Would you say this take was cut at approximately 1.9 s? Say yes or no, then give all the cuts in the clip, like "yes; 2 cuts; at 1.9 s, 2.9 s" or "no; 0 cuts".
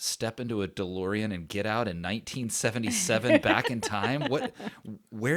no; 0 cuts